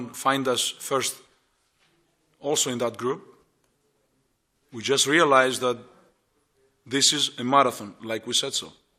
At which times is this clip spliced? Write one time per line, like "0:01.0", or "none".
0:07.1